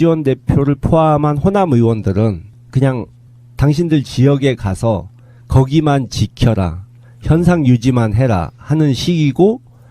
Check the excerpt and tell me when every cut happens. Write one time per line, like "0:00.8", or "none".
0:06.6